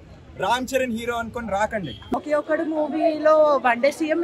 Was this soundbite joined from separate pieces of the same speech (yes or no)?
yes